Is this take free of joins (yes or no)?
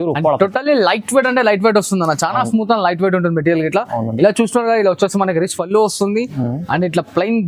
yes